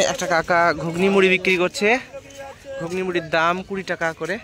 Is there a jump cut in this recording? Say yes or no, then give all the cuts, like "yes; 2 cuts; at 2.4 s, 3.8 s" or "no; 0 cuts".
no; 0 cuts